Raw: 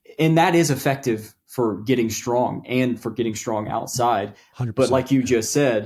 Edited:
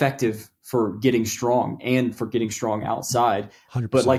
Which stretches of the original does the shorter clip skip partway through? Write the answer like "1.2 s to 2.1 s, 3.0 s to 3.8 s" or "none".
none